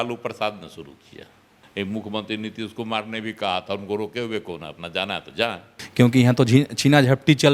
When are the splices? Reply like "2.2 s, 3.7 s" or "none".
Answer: 1.7 s, 5.8 s